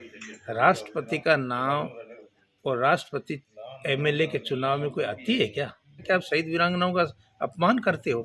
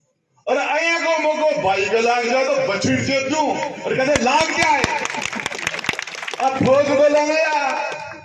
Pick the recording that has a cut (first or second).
first